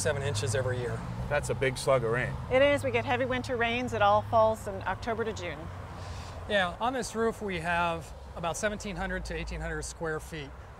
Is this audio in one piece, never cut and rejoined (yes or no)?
yes